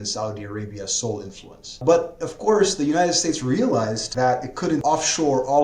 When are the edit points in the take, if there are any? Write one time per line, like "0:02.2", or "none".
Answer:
0:01.8
0:04.0
0:04.8